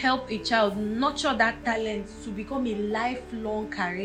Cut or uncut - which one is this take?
uncut